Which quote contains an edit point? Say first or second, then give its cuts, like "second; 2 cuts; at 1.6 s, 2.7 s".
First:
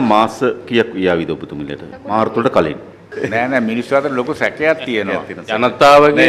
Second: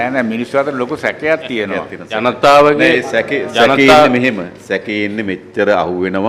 first; 1 cut; at 1.9 s